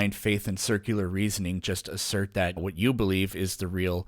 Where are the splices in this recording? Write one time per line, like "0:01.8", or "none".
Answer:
0:02.6